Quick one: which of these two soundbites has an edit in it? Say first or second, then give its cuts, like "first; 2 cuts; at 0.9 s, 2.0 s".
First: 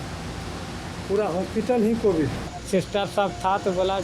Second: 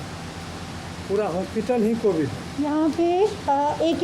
first; 1 cut; at 2.4 s